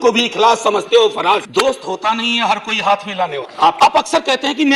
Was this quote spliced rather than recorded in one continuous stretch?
yes; 1 cut; at 3.8 s

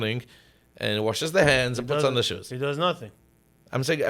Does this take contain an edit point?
no; 0 cuts

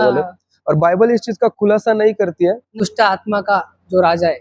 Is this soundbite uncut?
no; 1 cut; at 2.9 s

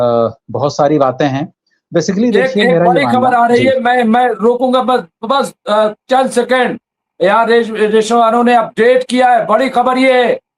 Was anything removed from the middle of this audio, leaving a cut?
no; 0 cuts

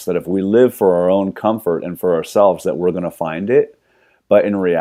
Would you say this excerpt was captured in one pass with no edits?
yes; 0 cuts

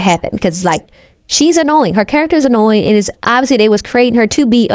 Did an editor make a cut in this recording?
no; 0 cuts

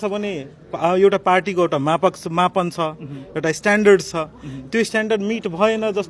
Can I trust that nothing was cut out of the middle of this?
yes; 0 cuts

